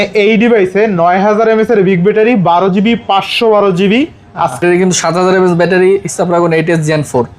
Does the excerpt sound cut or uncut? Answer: cut